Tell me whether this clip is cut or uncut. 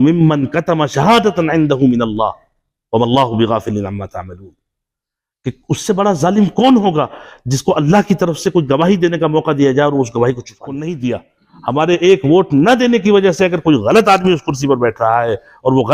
cut